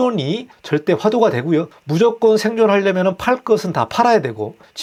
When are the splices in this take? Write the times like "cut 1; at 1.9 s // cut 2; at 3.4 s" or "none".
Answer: none